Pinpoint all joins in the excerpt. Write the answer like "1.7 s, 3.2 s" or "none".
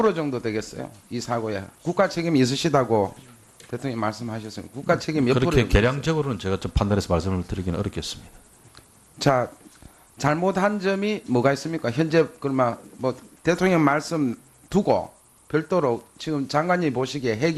6.4 s

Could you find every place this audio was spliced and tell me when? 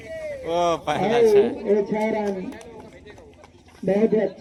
none

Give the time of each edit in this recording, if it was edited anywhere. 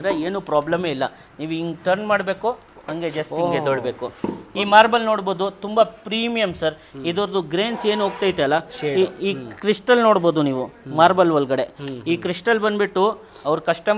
none

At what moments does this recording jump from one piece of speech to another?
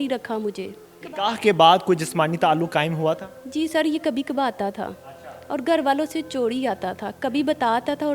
1.1 s

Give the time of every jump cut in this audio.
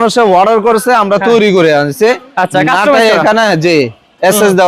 none

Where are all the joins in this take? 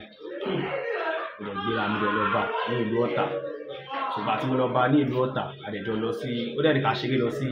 none

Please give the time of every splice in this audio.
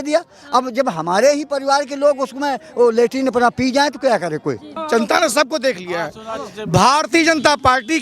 4.7 s

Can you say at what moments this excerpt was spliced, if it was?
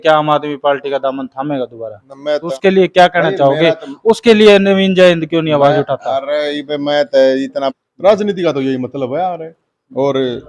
2.4 s, 7.8 s

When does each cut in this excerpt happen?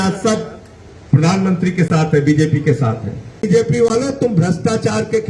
3.4 s

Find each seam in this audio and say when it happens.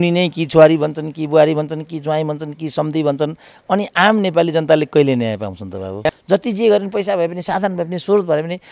6.0 s

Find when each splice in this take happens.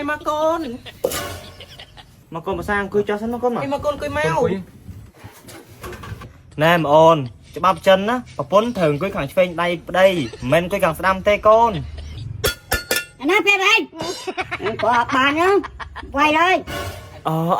2.3 s

